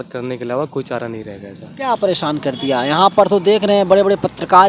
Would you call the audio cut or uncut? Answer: uncut